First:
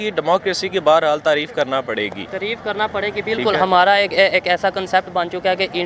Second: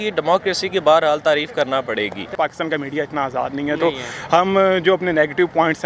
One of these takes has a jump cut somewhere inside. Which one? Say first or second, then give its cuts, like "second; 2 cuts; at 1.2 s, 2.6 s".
second; 1 cut; at 2.3 s